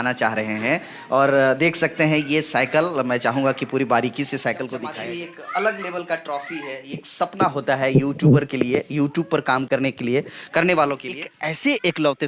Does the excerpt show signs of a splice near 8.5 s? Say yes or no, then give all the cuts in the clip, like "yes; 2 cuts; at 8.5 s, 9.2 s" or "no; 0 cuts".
no; 2 cuts; at 4.9 s, 11.3 s